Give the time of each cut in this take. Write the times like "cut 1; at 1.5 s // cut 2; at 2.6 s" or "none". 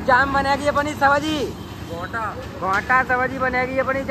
none